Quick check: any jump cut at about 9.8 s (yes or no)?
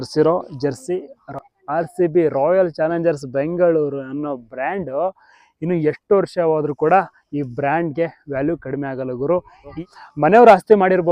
yes